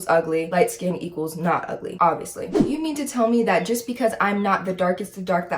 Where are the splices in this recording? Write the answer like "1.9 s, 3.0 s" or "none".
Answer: 2.6 s